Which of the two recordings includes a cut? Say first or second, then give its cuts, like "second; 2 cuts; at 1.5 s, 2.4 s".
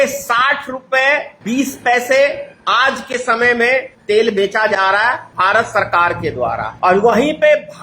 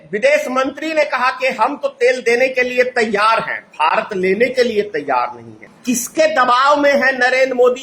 first; 4 cuts; at 1.3 s, 3.9 s, 5.3 s, 6.7 s